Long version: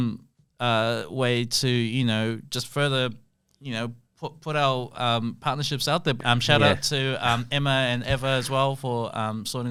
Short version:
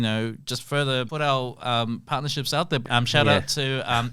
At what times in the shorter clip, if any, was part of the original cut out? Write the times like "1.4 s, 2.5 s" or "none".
1.1 s